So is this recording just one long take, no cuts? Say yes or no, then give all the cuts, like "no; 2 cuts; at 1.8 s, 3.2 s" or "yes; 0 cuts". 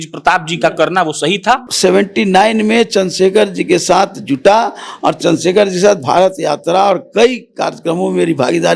no; 1 cut; at 1.7 s